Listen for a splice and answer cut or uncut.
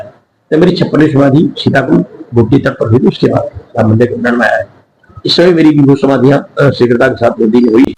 uncut